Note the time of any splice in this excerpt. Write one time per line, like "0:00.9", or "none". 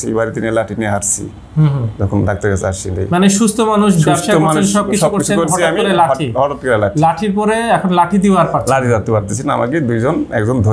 none